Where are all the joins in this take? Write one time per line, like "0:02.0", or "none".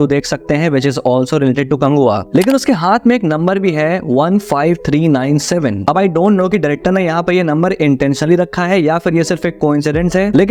none